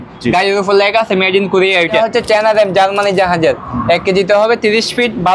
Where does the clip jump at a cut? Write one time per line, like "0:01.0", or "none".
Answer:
0:02.0